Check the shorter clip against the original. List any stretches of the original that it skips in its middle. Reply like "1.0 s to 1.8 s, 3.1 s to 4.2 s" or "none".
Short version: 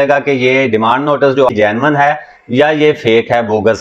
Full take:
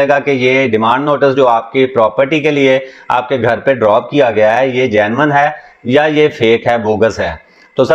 1.5 s to 4.9 s